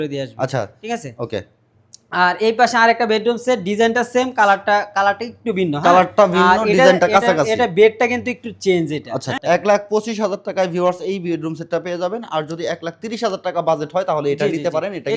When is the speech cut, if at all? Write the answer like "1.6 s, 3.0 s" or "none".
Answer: 9.3 s